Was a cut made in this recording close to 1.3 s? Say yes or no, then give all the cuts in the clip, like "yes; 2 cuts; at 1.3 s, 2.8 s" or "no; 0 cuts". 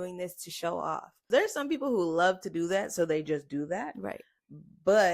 yes; 1 cut; at 1.3 s